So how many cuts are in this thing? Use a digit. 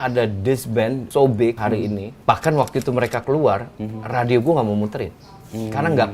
2